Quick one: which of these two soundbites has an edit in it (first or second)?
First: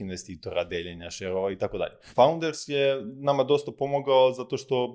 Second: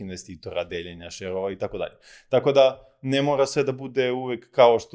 first